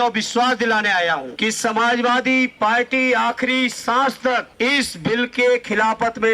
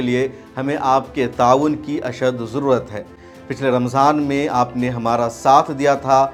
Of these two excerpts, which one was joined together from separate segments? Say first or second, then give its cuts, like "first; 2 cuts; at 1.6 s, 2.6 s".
first; 2 cuts; at 1.3 s, 4.5 s